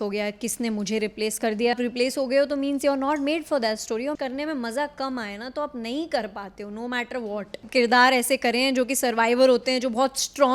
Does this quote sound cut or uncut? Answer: cut